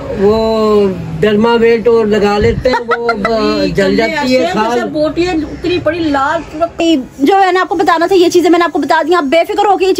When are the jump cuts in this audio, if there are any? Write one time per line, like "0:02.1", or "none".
0:06.8